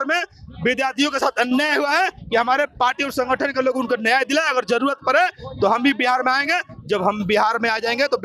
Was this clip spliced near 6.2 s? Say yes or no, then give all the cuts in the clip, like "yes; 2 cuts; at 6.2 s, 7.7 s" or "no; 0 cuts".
no; 0 cuts